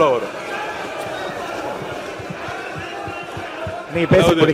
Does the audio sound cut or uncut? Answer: uncut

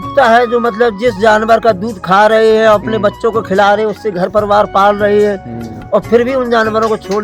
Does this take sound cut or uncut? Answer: uncut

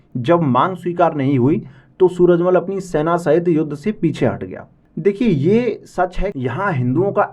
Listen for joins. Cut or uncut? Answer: cut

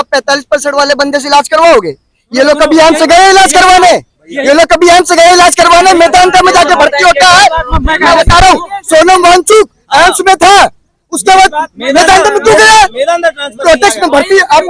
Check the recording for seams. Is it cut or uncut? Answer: uncut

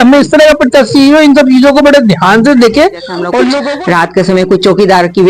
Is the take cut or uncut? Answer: cut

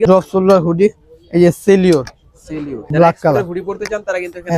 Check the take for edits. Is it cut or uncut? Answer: cut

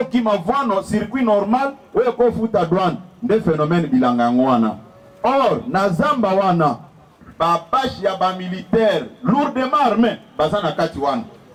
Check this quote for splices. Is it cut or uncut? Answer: uncut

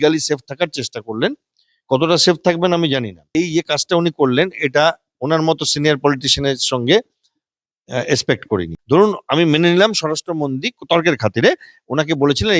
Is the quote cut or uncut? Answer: cut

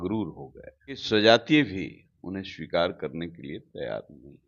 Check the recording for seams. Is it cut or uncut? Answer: cut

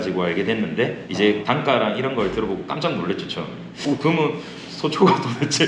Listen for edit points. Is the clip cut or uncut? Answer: cut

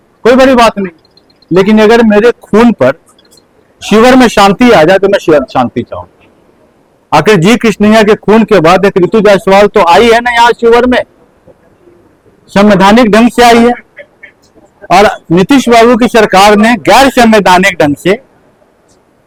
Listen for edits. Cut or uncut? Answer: uncut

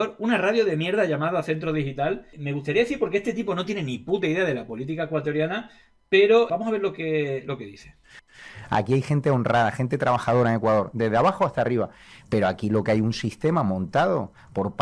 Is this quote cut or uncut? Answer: uncut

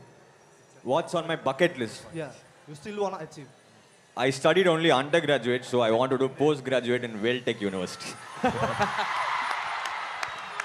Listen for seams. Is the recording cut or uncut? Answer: uncut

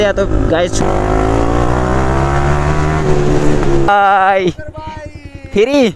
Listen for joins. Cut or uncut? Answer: cut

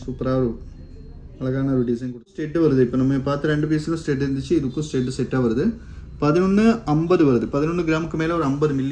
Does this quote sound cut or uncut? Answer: cut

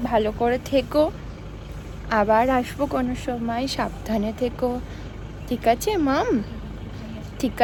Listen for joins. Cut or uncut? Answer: uncut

